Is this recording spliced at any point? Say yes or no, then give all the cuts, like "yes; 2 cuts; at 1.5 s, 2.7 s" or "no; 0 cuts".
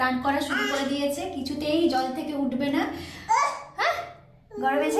no; 0 cuts